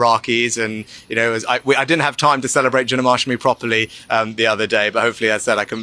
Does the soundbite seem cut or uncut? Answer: uncut